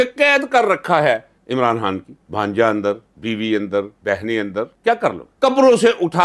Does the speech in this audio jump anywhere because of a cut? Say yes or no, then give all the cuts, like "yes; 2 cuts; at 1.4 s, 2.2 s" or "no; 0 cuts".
yes; 1 cut; at 1.3 s